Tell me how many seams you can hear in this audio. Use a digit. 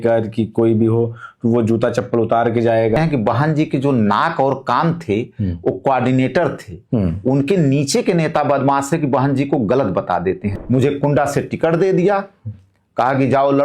2